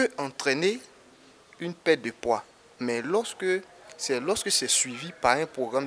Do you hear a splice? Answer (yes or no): no